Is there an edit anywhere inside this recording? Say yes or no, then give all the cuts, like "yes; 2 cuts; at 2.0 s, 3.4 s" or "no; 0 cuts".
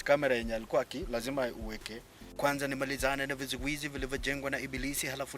yes; 1 cut; at 2.3 s